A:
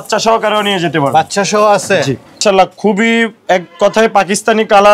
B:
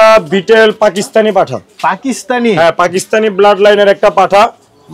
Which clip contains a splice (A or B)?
A